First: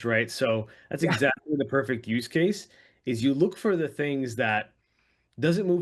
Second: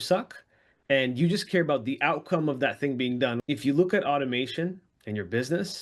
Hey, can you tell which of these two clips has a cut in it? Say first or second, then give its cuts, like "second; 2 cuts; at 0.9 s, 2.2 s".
second; 1 cut; at 3.4 s